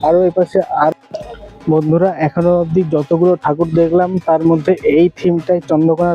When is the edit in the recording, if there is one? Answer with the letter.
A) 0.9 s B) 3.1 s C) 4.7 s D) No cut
A